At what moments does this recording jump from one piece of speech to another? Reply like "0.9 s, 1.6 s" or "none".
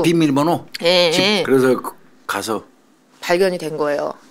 1.4 s